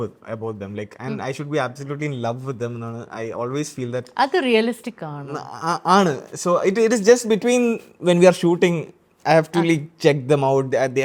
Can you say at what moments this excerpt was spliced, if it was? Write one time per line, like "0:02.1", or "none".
none